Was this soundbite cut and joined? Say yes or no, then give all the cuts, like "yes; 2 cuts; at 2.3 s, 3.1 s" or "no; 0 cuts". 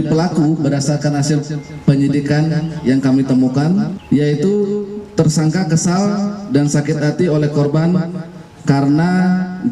yes; 1 cut; at 4.0 s